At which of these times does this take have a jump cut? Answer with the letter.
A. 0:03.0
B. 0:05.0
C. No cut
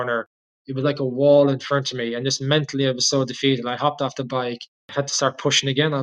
B